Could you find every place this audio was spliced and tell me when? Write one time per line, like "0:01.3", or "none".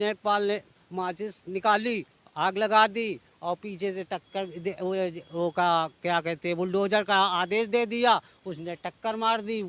none